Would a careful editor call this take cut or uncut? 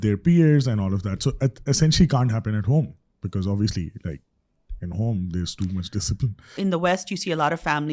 cut